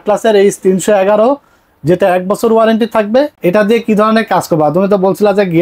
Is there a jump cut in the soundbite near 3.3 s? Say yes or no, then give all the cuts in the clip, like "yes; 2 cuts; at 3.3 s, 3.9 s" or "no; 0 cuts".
yes; 1 cut; at 3.3 s